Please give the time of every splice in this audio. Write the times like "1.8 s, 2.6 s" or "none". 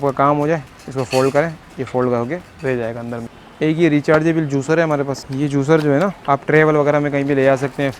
3.4 s, 5.2 s, 6.2 s